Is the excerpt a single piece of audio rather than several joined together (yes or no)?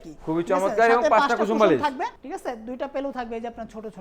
no